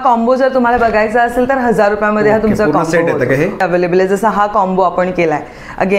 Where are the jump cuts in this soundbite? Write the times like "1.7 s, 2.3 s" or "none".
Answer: 3.6 s